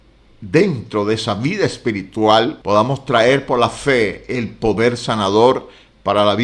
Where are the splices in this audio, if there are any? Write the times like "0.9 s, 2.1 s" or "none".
2.6 s